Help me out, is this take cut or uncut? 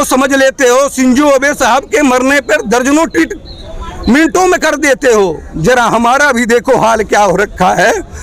uncut